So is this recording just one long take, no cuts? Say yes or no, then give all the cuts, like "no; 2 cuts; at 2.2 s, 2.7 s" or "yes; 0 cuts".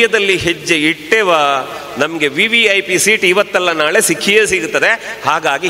yes; 0 cuts